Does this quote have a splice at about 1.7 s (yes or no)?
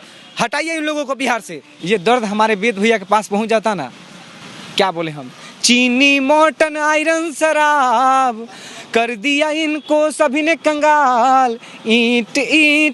yes